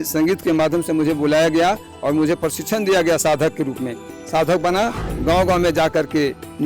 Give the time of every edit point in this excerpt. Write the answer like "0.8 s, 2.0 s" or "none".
5.0 s